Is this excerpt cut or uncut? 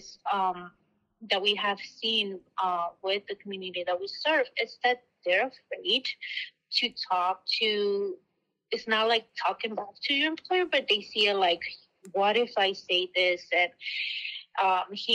uncut